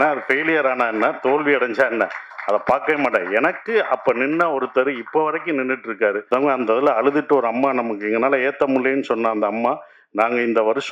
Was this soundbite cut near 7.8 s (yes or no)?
no